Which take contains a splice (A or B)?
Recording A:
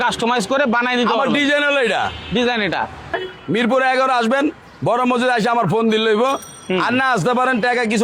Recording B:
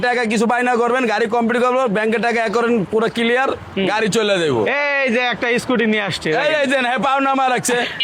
A